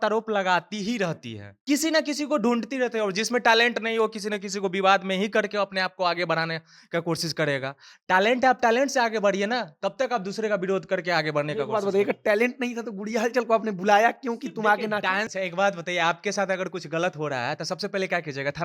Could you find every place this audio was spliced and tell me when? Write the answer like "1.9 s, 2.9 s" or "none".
1.5 s, 15.3 s